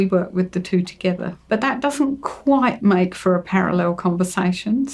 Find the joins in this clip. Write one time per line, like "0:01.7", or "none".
0:01.5